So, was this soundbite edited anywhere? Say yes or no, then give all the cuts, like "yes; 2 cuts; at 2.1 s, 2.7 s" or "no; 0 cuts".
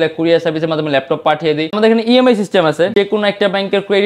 yes; 2 cuts; at 1.8 s, 2.9 s